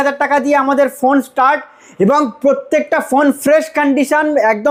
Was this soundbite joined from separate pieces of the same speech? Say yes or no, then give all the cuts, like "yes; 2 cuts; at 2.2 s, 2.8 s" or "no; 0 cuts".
no; 0 cuts